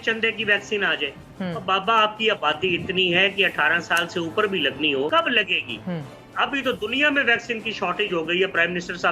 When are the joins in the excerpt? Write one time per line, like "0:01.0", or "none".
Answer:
0:05.1